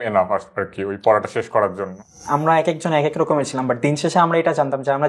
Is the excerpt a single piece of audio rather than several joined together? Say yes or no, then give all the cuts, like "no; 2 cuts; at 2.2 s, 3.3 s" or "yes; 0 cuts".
no; 1 cut; at 2.2 s